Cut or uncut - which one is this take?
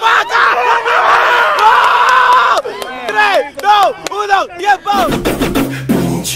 cut